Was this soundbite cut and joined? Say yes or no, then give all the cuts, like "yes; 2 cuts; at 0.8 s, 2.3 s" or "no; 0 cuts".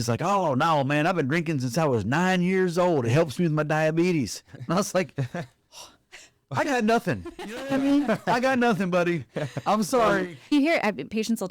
yes; 1 cut; at 10.5 s